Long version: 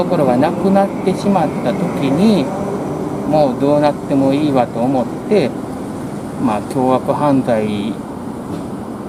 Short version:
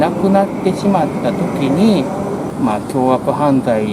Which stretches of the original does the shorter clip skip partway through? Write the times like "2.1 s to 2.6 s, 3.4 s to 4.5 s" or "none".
2.9 s to 6.3 s